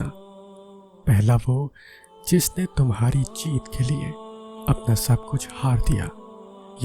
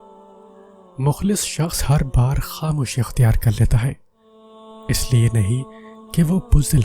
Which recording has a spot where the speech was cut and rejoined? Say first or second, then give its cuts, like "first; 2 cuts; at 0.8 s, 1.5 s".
second; 1 cut; at 0.9 s